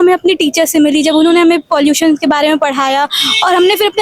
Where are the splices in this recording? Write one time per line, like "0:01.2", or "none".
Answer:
none